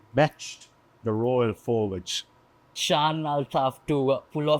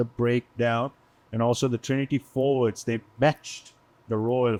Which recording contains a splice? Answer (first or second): first